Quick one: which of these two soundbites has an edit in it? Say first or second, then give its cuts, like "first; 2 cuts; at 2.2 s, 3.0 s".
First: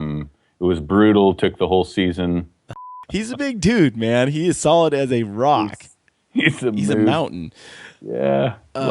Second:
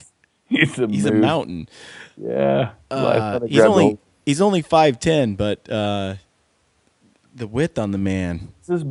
first; 1 cut; at 2.7 s